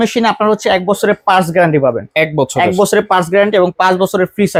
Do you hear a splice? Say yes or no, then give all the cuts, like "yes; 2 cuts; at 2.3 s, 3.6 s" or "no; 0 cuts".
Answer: no; 0 cuts